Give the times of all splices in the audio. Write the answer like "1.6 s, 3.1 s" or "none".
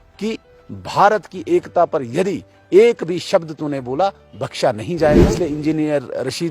5.2 s

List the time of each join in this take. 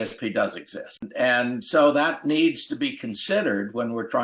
1.1 s

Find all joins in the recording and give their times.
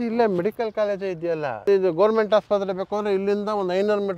1.6 s

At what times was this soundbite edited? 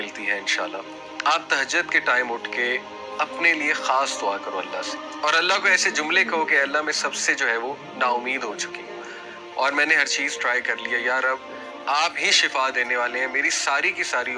none

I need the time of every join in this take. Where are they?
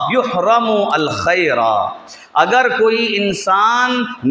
none

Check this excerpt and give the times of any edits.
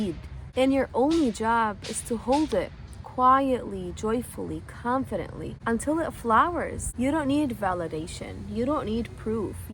6.8 s

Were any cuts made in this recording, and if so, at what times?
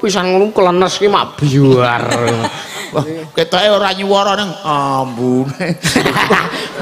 none

